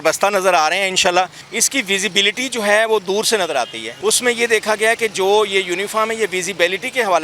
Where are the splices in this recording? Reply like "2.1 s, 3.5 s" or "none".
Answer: 1.4 s, 3.8 s